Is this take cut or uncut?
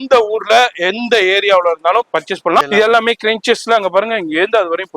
cut